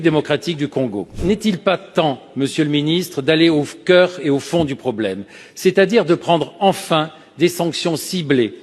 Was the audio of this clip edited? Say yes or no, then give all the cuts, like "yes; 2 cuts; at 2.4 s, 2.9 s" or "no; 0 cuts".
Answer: yes; 1 cut; at 1.2 s